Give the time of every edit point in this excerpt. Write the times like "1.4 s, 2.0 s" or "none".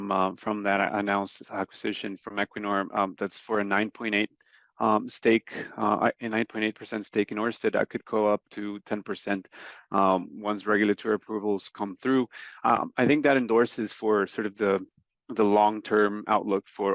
none